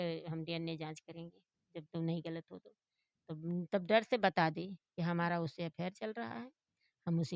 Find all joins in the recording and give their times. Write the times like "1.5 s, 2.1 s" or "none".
none

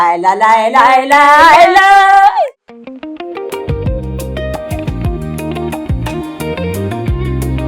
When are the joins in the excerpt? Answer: 2.4 s

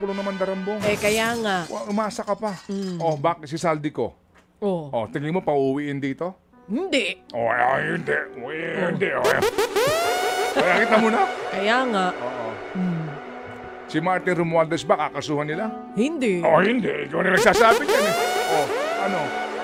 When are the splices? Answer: none

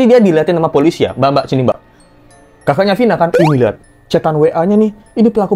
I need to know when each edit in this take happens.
none

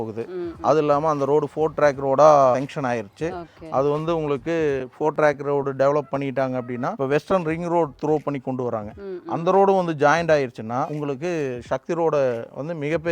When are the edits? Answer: 2.5 s, 6.9 s, 10.9 s

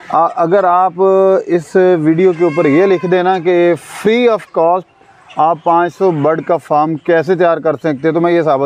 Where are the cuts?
none

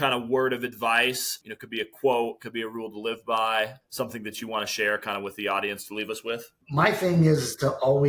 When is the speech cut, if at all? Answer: 1.3 s, 3.8 s, 6.5 s

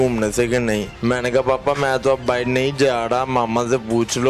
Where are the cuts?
0.9 s

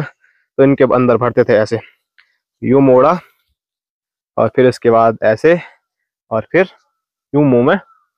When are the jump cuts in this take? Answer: none

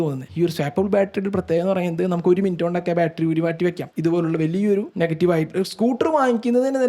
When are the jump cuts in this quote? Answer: 3.9 s

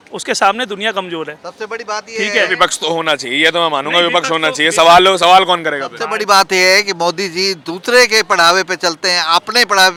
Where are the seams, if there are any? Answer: none

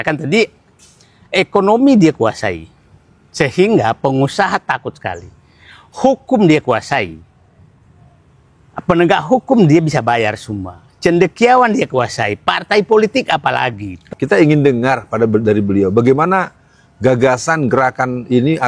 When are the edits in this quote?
13.9 s

